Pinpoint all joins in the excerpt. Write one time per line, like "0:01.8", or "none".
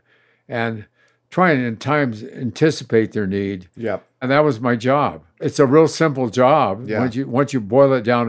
0:04.2
0:05.4